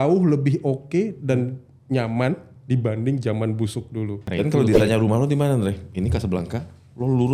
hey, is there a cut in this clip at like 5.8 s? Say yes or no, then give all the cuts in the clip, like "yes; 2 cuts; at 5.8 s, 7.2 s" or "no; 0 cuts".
no; 1 cut; at 4.2 s